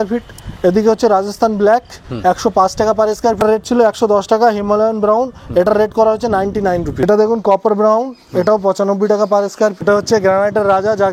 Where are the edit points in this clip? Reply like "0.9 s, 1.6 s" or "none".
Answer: 3.4 s, 7.1 s, 9.8 s